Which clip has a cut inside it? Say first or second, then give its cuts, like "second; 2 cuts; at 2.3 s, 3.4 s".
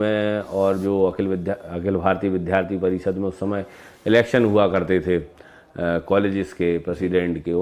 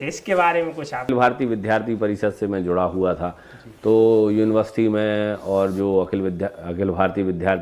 second; 1 cut; at 1.1 s